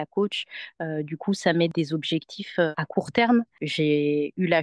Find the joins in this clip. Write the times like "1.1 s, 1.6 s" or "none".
3.6 s